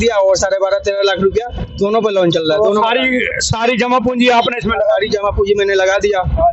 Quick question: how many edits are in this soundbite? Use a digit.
0